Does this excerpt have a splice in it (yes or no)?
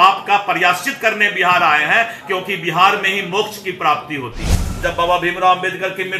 yes